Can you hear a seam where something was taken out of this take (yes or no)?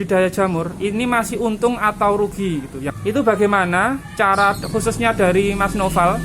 yes